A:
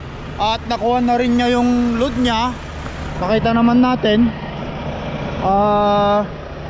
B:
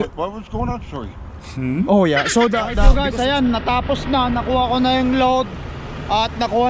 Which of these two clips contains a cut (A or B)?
B